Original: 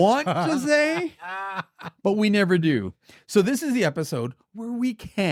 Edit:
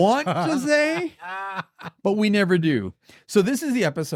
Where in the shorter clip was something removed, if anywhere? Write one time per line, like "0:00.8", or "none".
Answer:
none